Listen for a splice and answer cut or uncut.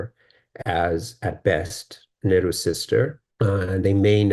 cut